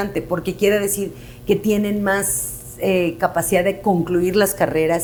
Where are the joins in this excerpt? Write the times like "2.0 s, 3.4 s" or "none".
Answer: none